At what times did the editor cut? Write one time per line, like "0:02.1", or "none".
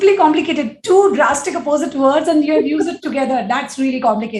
none

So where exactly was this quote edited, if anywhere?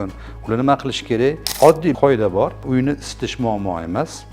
0:01.5

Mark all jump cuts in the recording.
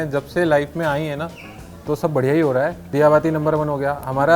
0:02.9

